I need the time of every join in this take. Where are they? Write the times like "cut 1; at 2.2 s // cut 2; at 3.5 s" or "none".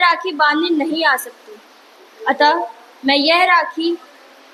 none